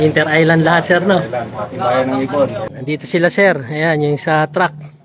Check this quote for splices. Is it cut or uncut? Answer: cut